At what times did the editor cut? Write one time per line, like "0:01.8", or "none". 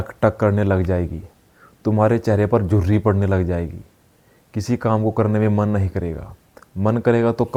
none